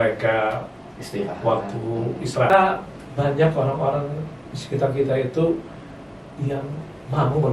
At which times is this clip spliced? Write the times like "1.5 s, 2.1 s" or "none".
2.5 s